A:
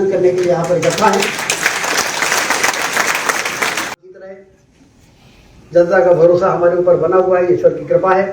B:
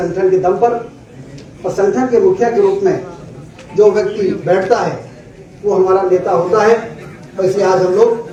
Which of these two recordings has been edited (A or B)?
A